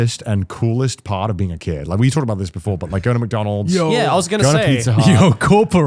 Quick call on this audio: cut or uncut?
uncut